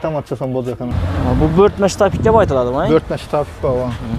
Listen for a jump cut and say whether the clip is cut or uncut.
cut